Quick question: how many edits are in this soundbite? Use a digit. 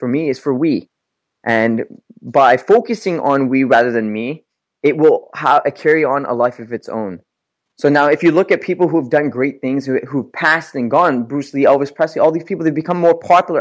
0